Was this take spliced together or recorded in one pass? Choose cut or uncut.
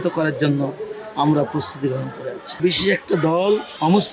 cut